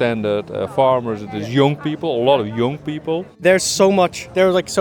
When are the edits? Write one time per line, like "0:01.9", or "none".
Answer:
0:03.4

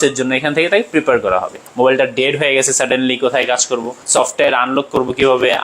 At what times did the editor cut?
0:01.6
0:04.0

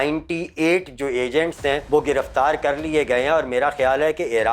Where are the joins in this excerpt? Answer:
0:01.8

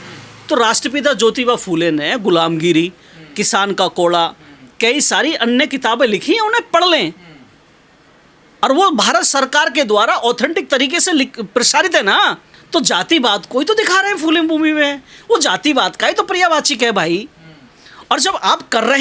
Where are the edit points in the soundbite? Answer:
0:12.5

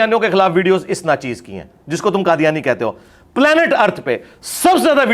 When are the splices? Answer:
none

